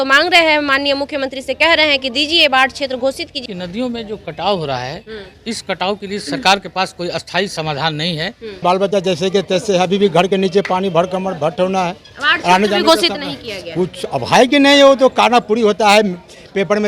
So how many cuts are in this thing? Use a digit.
2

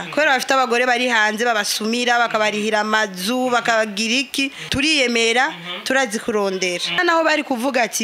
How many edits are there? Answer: 2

